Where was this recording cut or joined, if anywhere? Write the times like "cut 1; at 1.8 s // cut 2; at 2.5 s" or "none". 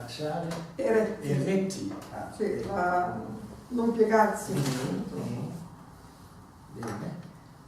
cut 1; at 5.3 s